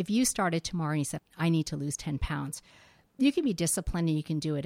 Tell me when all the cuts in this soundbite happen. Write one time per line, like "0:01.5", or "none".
0:01.1